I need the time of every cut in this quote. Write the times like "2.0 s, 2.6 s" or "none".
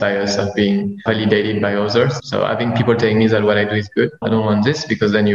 1.0 s, 2.2 s, 4.2 s